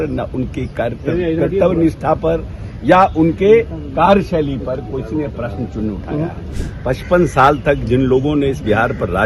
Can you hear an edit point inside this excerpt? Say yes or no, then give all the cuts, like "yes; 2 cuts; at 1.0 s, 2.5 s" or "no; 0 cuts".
yes; 1 cut; at 6.5 s